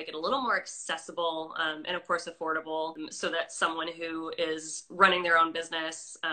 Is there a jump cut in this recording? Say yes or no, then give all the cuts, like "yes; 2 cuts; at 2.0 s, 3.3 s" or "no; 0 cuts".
yes; 1 cut; at 3.0 s